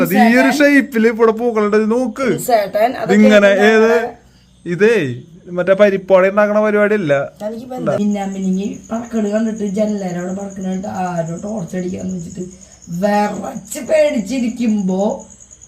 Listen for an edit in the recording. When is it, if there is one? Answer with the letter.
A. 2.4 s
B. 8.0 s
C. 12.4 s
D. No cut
B